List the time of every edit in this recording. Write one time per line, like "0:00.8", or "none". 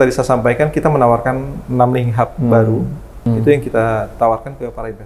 0:03.3